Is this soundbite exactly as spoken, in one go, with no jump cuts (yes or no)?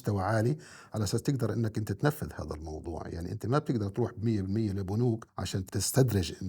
no